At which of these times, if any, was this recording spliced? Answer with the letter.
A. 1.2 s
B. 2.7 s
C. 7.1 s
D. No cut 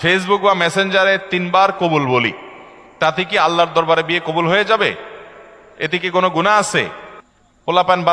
D